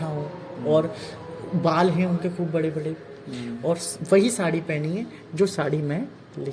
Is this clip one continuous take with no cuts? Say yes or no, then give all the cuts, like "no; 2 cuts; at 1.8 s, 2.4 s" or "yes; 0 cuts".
yes; 0 cuts